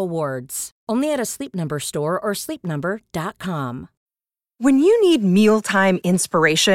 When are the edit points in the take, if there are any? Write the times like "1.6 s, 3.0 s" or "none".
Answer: none